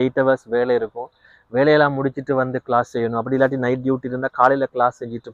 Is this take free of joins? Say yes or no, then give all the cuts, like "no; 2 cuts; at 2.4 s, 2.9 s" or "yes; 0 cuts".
yes; 0 cuts